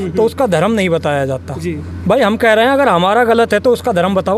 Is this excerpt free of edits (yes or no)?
yes